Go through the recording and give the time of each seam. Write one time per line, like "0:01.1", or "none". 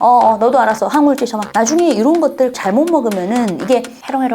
0:01.4
0:02.6